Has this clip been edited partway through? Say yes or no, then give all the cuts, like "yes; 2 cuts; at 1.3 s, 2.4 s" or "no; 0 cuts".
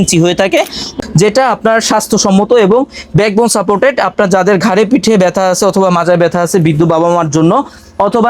yes; 1 cut; at 0.9 s